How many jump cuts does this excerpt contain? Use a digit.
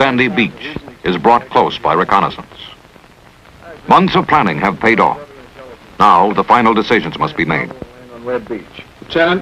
1